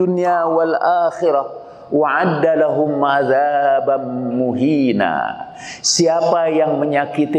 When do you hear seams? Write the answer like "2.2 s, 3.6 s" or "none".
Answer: none